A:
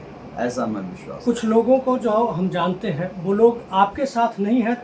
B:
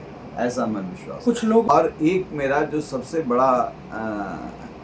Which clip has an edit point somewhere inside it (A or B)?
B